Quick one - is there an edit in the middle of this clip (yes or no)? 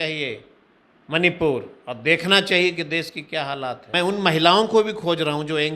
yes